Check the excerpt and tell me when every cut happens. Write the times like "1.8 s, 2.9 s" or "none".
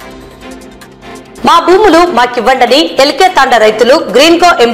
1.0 s